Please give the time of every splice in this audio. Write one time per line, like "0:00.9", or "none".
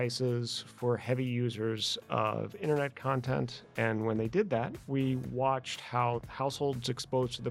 none